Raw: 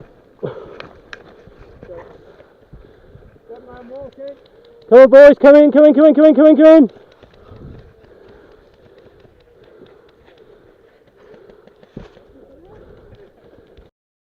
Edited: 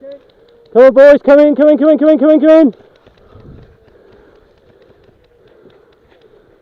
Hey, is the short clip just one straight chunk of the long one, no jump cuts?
yes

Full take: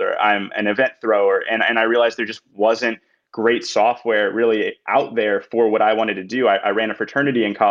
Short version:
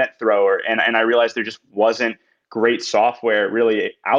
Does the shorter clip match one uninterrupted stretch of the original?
yes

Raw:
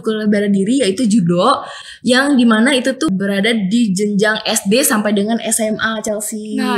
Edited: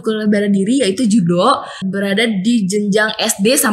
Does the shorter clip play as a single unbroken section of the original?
no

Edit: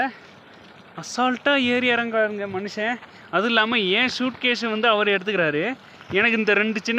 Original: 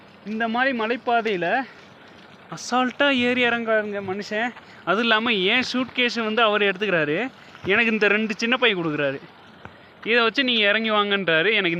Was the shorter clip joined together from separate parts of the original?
no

